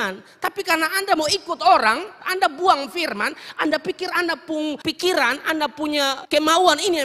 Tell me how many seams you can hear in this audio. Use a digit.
3